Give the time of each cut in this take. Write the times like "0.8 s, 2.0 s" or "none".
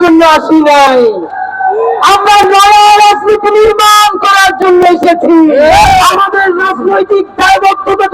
5.8 s